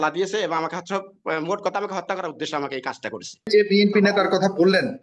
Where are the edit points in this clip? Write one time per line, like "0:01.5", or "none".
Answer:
0:03.5

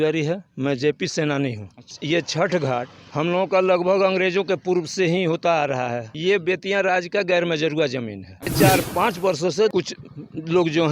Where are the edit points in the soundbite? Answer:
0:01.9
0:06.1
0:08.4
0:09.7

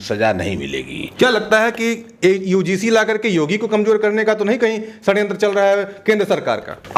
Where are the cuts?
none

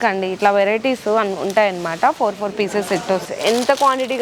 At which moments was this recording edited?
0:03.2

